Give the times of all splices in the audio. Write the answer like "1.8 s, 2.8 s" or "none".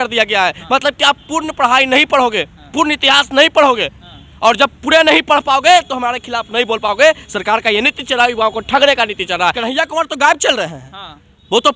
9.6 s

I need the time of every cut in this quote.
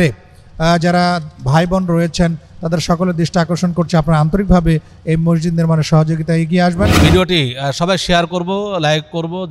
6.9 s

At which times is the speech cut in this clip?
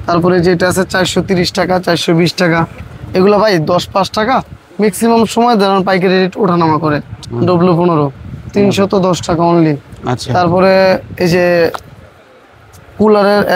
7.1 s

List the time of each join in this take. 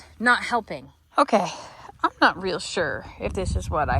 1.0 s

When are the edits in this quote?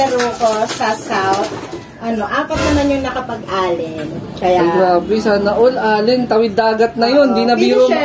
none

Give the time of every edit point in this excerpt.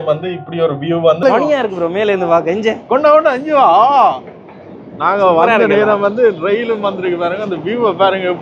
1.2 s

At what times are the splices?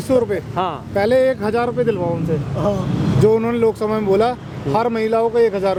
none

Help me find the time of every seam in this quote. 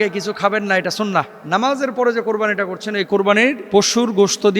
1.4 s, 3.6 s

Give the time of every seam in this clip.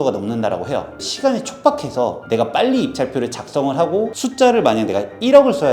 0.9 s, 4.2 s

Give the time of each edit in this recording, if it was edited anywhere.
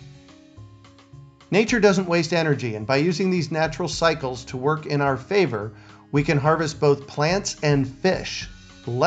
1.4 s

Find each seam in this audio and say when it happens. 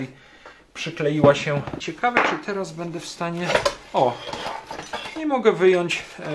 1.8 s

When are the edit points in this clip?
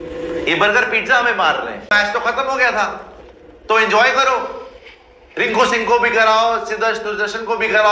1.9 s

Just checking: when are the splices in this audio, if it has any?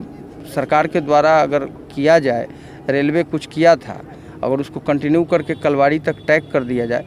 none

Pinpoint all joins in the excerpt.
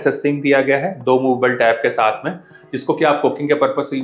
none

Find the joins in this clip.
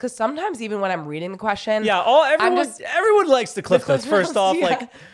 2.8 s

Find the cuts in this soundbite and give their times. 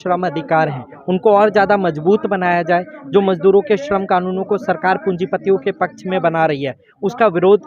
none

